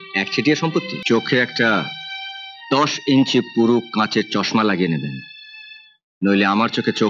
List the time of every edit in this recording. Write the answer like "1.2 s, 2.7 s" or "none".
0.9 s